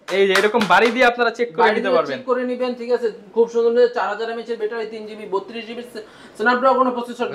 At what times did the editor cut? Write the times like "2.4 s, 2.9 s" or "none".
none